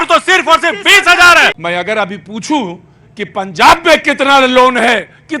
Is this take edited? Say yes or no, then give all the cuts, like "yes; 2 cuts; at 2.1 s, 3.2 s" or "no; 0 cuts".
yes; 1 cut; at 1.6 s